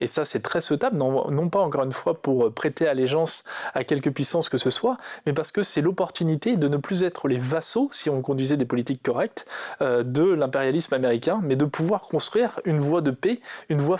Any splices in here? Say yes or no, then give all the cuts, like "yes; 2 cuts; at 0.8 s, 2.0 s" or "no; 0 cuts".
no; 0 cuts